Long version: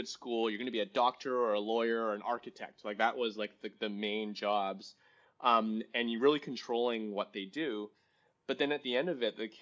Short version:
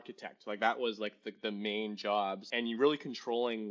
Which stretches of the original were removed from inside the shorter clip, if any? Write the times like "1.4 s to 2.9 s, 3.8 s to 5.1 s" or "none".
4.9 s to 5.9 s